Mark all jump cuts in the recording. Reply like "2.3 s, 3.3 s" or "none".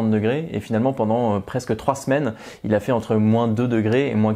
none